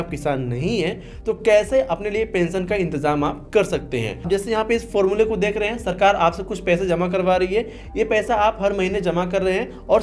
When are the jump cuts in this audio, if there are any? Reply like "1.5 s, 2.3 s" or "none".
none